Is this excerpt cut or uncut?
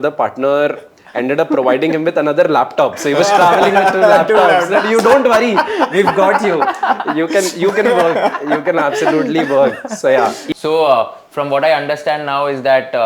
cut